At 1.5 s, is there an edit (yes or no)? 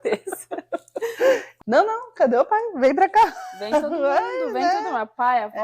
yes